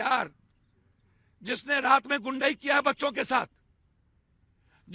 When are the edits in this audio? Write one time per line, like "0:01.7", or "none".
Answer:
none